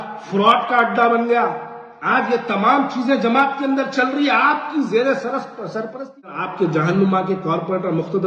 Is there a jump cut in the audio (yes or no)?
yes